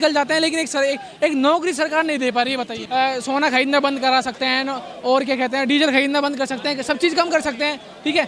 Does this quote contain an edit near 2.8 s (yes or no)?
yes